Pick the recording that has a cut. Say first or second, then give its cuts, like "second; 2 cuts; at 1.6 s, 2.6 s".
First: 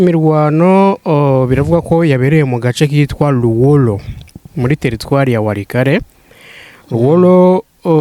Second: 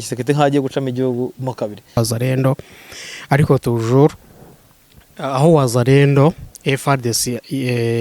second; 1 cut; at 2.0 s